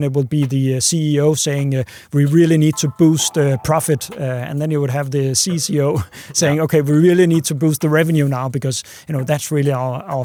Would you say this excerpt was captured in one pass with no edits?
yes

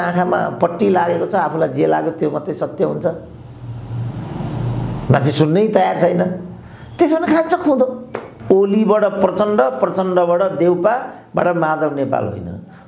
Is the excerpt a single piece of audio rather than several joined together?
no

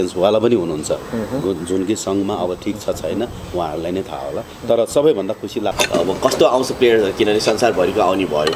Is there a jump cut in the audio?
yes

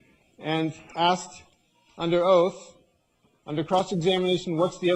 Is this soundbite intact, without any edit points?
yes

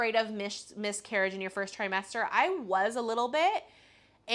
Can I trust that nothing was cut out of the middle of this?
yes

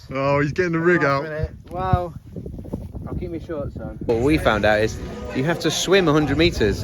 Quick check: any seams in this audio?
yes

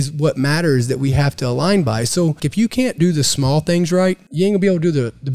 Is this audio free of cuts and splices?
no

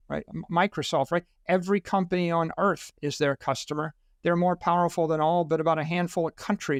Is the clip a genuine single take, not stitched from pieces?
yes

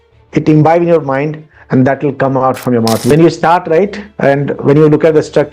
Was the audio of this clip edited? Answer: yes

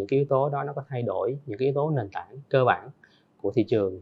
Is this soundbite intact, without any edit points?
yes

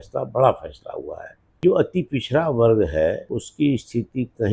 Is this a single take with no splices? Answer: no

